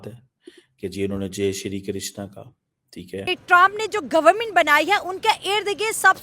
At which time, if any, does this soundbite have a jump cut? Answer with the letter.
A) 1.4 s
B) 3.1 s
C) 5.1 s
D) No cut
B